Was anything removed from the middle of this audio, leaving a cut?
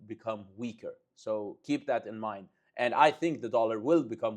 no; 0 cuts

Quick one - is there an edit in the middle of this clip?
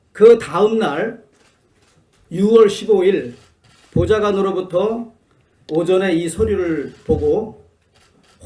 no; 0 cuts

